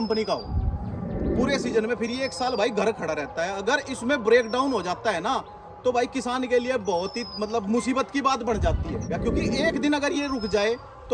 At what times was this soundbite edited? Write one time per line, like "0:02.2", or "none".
0:09.1